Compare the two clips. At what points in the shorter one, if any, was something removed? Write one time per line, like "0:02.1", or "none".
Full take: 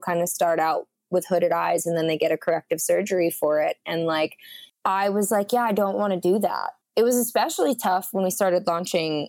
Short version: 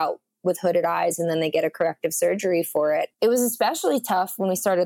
0:03.1

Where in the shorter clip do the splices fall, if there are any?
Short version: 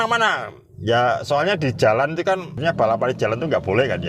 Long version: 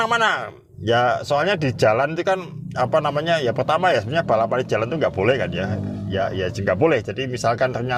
0:02.6

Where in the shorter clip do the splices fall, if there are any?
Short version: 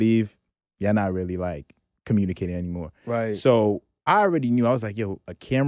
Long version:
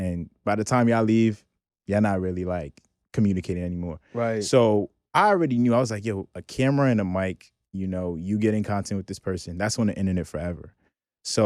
none

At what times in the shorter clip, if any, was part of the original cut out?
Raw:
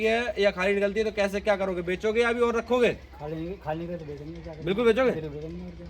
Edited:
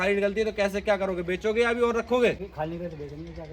0:02.5

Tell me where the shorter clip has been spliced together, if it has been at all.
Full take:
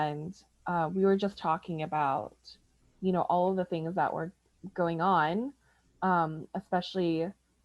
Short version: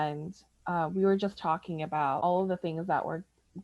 0:02.2

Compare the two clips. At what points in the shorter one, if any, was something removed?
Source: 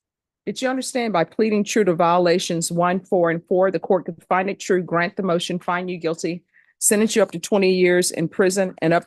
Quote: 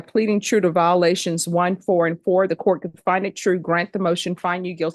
none

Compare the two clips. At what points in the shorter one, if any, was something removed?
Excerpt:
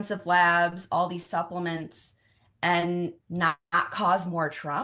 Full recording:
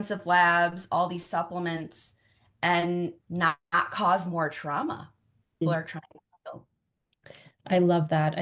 none

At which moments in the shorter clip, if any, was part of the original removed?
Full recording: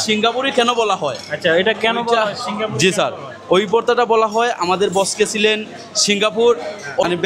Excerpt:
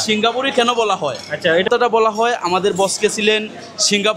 0:01.7

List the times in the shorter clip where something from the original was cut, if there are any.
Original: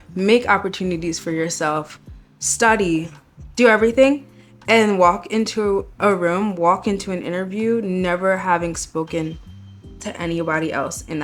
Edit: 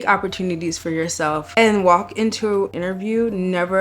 0:01.5
0:02.8

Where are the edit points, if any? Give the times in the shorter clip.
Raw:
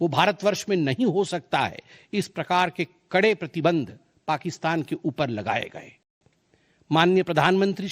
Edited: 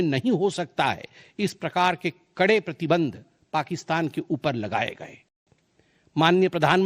none

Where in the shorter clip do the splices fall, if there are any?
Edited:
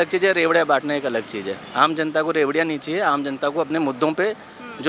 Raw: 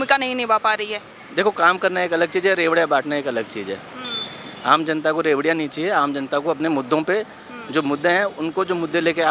0:01.6

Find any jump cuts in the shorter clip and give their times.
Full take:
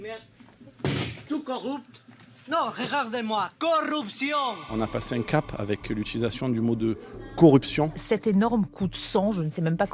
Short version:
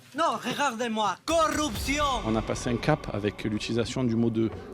0:02.2

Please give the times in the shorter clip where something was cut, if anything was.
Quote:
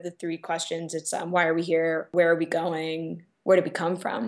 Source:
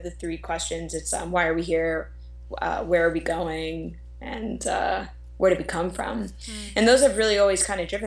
0:02.1
0:03.3

